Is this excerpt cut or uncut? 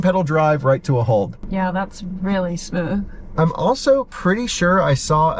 uncut